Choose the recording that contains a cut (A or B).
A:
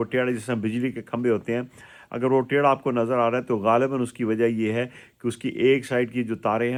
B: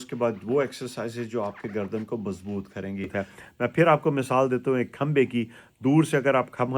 B